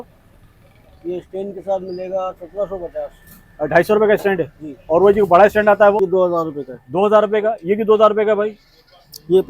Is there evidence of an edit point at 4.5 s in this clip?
no; 1 cut; at 6.0 s

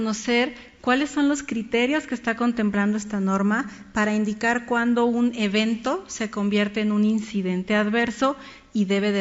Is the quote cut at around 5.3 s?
yes; 1 cut; at 5.3 s

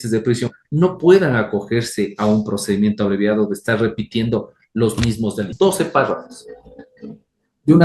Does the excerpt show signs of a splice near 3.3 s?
no; 1 cut; at 5.5 s

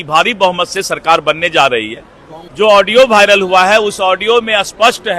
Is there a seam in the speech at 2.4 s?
yes; 1 cut; at 2.4 s

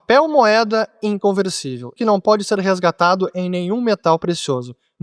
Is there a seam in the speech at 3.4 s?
no; 1 cut; at 1.9 s

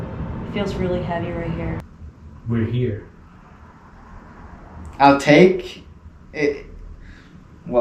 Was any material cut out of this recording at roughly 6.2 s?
no; 1 cut; at 1.8 s

